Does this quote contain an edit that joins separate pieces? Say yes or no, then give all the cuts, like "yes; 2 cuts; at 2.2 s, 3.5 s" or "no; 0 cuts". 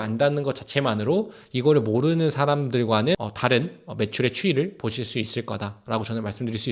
no; 0 cuts